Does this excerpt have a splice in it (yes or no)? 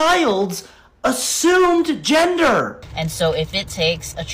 yes